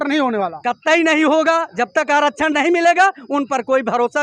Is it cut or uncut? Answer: uncut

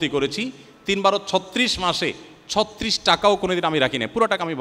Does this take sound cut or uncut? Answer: uncut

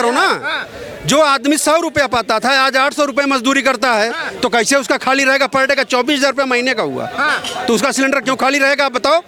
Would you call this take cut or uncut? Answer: uncut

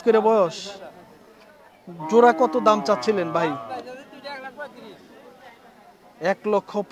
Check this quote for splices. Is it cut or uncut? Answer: uncut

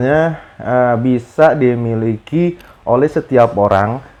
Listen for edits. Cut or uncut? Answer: uncut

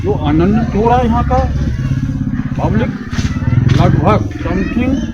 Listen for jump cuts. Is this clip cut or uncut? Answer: uncut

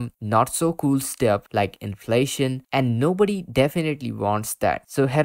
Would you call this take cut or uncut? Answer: uncut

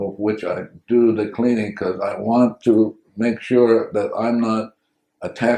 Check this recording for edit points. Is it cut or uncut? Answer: uncut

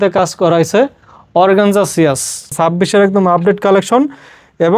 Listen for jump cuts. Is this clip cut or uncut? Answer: cut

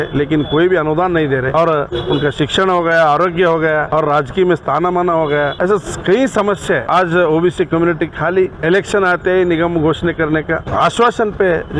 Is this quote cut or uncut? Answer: cut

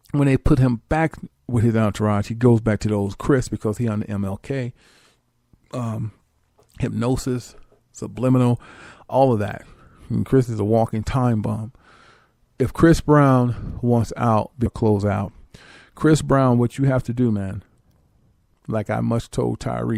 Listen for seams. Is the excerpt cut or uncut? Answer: uncut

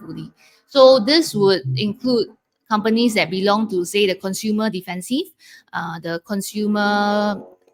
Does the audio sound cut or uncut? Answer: uncut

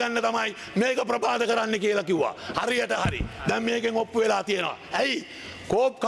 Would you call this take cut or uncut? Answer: uncut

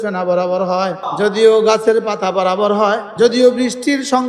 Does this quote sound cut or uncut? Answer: cut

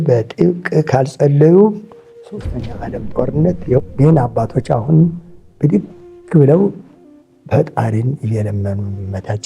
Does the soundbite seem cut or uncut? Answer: cut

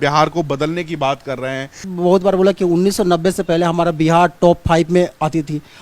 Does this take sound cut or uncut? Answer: cut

